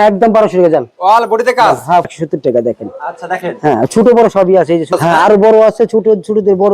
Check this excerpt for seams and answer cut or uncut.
cut